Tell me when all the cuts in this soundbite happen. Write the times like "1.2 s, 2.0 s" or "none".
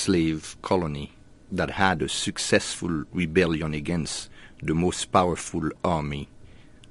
1.3 s